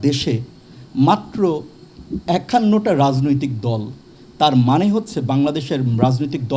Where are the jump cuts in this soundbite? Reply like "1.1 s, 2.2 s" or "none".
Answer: none